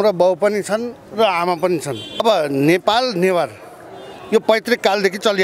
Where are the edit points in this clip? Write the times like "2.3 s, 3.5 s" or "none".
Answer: 2.2 s